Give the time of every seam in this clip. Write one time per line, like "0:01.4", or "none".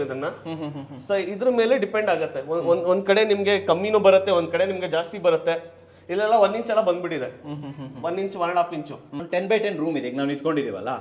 0:09.1